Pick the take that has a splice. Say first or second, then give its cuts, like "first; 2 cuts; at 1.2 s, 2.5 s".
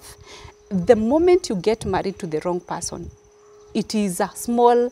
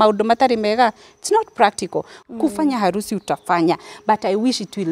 second; 1 cut; at 2.2 s